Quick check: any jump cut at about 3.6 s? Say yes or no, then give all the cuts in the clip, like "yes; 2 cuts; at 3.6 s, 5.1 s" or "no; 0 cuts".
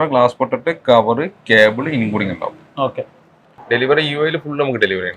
yes; 1 cut; at 3.6 s